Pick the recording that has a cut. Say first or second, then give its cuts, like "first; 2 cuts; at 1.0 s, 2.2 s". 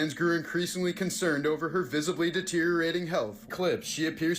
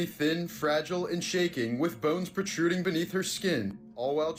first; 1 cut; at 3.5 s